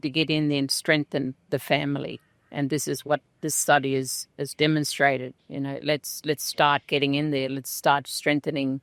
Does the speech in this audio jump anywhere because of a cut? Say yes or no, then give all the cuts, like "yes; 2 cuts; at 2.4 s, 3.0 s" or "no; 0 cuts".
no; 0 cuts